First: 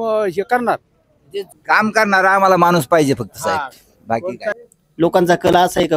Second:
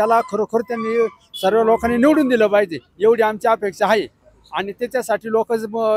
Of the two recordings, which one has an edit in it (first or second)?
first